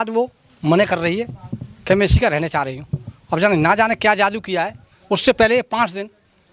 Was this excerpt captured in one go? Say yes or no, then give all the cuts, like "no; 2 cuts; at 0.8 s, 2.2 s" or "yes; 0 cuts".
yes; 0 cuts